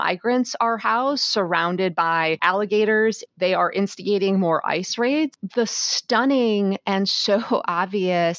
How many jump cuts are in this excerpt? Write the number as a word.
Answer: three